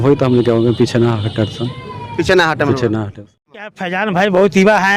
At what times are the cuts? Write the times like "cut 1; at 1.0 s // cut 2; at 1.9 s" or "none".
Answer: cut 1; at 3.7 s